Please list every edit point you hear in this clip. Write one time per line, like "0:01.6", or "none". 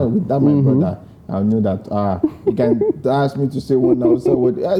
none